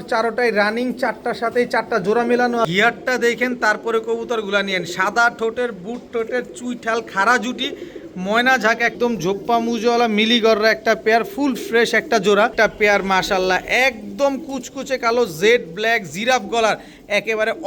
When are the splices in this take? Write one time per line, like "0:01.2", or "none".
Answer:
0:02.7
0:08.9
0:12.5